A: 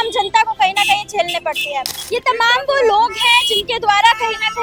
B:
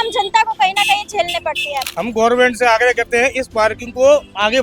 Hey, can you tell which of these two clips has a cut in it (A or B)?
B